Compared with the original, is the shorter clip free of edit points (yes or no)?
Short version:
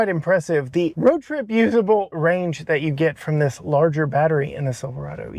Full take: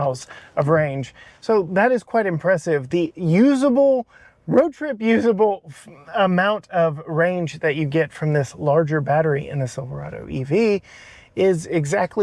no